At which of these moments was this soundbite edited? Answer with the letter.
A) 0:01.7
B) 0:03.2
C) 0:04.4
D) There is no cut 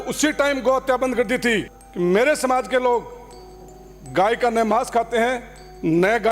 A